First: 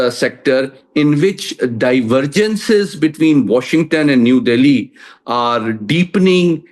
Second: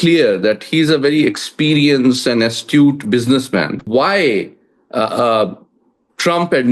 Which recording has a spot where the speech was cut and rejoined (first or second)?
second